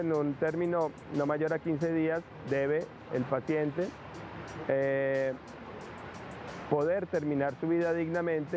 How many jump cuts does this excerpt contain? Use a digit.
1